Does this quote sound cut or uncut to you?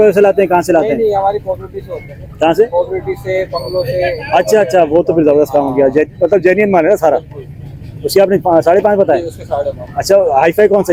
uncut